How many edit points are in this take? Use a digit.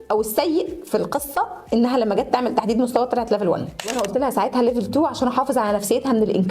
1